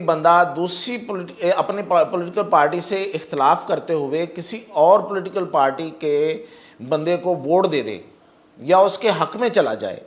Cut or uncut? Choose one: uncut